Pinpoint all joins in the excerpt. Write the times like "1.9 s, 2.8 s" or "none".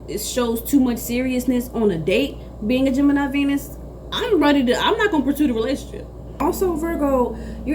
6.4 s